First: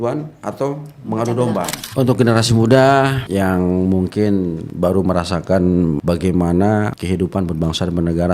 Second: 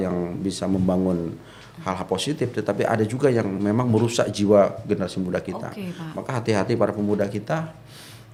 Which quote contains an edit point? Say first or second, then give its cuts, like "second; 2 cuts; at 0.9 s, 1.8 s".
first; 5 cuts; at 1.8 s, 3.2 s, 4.6 s, 6.0 s, 7.0 s